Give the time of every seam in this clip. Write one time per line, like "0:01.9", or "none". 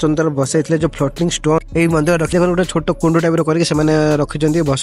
0:02.3